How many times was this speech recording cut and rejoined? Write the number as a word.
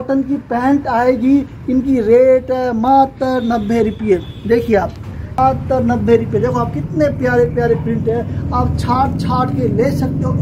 one